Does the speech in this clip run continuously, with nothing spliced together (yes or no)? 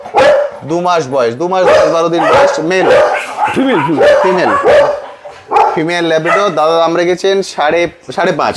yes